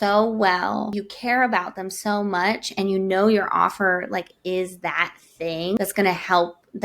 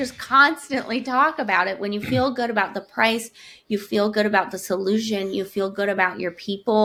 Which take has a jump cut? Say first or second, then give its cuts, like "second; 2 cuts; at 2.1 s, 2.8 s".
first; 2 cuts; at 1.0 s, 5.8 s